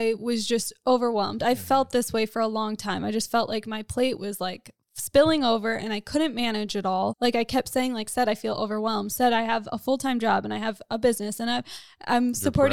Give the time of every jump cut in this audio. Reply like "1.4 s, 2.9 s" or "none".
7.1 s